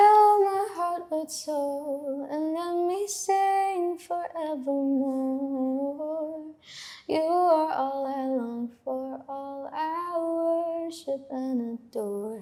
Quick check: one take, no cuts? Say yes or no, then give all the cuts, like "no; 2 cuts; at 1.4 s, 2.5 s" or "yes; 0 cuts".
yes; 0 cuts